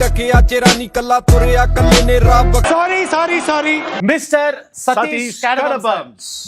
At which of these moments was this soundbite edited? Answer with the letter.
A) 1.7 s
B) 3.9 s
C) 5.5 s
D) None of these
B